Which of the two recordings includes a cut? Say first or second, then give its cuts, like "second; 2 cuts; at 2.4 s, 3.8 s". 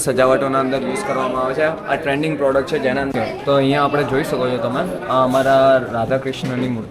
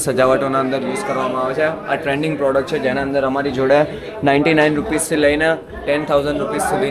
first; 1 cut; at 3.1 s